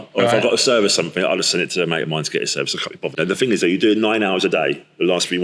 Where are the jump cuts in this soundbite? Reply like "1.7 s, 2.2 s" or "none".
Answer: 3.1 s